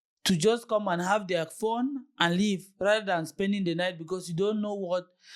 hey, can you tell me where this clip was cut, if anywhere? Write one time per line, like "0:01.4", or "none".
none